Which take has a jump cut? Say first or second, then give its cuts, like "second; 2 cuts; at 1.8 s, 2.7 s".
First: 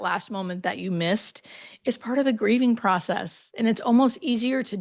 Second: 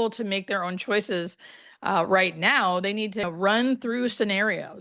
second; 1 cut; at 3.3 s